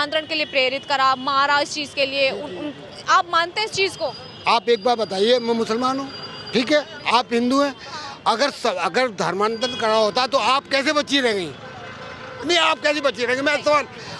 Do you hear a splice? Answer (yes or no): no